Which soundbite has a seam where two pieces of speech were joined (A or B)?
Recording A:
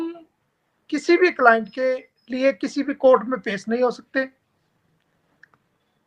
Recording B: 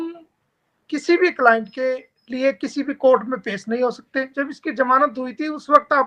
B